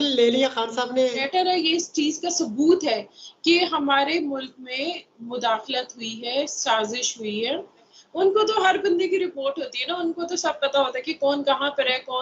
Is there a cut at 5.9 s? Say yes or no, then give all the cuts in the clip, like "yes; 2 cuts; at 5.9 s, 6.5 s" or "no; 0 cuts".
no; 2 cuts; at 1.3 s, 8.0 s